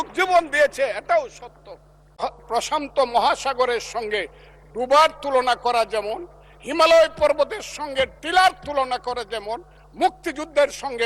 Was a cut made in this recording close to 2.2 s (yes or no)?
yes